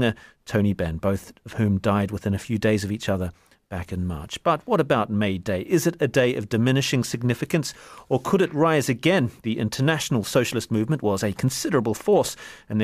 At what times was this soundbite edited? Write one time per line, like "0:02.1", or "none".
0:01.3